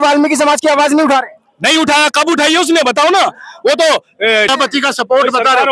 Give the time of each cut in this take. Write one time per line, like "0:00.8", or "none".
0:04.5